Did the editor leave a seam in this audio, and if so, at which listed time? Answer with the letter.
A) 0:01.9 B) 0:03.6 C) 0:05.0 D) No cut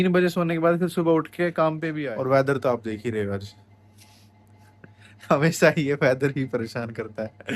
A